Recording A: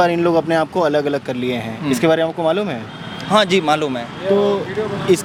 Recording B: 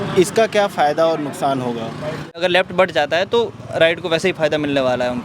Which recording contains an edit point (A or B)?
B